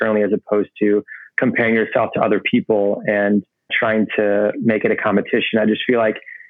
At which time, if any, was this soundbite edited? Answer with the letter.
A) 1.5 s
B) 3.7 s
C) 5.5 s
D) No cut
B